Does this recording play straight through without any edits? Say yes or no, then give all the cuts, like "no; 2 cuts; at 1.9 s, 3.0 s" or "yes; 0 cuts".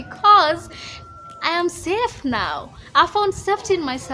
yes; 0 cuts